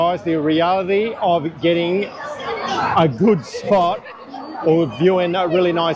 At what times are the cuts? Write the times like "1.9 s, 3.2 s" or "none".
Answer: none